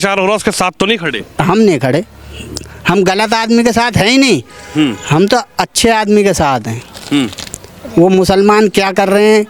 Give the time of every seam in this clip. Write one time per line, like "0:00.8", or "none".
none